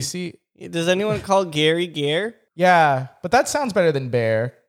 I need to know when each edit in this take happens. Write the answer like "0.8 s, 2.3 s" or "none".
2.4 s